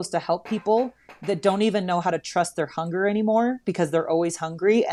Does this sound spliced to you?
no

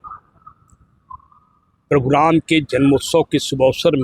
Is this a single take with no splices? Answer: yes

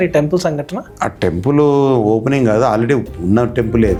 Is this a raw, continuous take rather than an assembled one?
yes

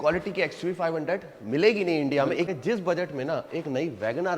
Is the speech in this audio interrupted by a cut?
yes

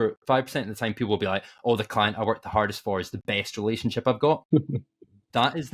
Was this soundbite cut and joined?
no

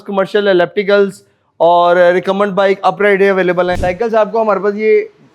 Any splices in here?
yes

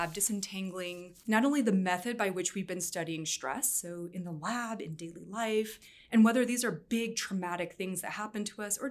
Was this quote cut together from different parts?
yes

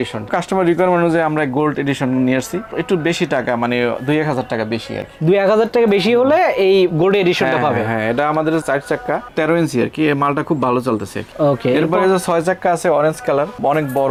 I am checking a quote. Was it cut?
no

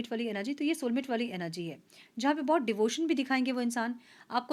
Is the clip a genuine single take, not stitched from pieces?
yes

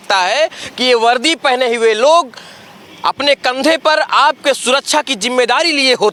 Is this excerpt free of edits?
yes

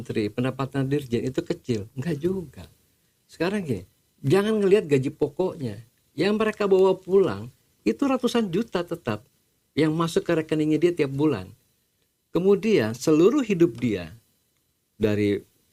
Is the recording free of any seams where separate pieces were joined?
yes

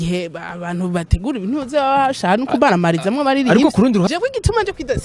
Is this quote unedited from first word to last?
no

